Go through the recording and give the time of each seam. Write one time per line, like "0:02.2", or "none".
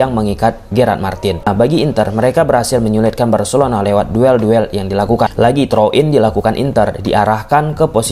0:01.5
0:05.3

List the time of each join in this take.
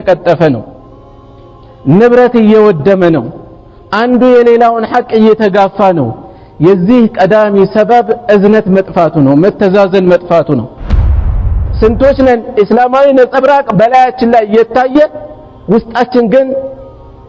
0:11.3

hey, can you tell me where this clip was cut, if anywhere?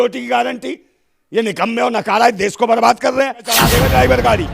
0:03.6

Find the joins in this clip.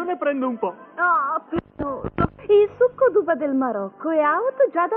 0:03.3

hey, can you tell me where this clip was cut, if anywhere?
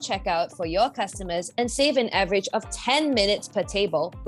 none

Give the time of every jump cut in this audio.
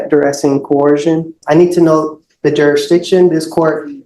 0:01.4

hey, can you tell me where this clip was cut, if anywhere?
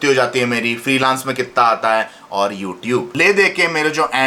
0:03.1

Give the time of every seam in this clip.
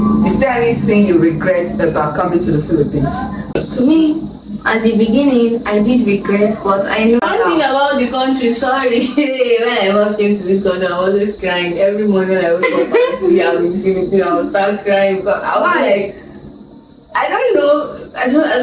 0:03.6
0:07.2

